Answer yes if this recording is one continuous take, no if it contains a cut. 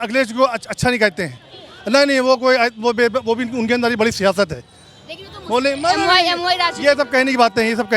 yes